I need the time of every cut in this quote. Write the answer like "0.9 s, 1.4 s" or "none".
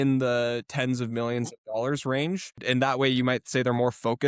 2.6 s